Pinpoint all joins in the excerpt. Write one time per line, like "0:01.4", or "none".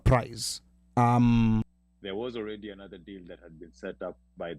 0:01.7